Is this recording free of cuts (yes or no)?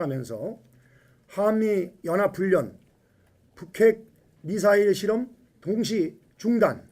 no